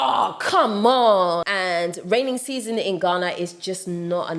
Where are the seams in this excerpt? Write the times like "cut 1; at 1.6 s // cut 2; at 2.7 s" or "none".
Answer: cut 1; at 1.5 s